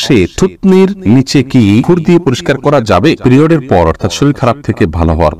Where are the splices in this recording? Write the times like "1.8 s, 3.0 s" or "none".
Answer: 1.0 s, 1.9 s, 3.2 s